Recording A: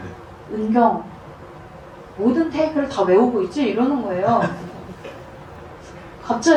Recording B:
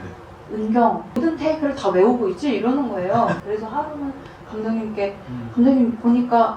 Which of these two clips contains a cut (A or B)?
B